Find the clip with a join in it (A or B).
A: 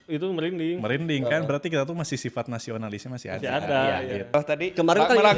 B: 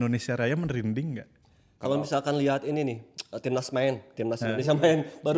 A